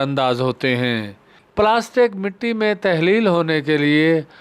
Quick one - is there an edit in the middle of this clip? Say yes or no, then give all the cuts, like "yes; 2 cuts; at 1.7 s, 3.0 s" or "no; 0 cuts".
yes; 1 cut; at 1.4 s